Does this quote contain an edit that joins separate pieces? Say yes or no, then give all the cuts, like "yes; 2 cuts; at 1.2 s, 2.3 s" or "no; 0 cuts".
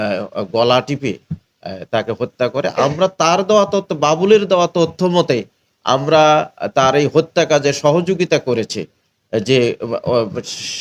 no; 0 cuts